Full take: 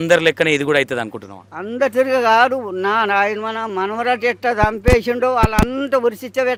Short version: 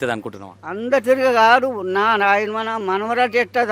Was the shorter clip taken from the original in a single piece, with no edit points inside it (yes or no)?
yes